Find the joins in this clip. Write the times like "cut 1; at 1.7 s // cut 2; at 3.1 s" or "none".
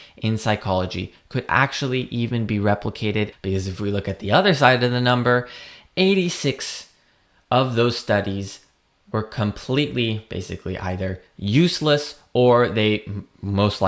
cut 1; at 3.4 s